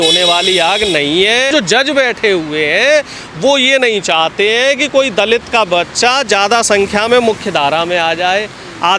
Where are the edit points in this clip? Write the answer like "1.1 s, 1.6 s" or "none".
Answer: 1.5 s